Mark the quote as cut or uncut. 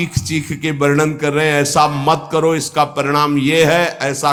uncut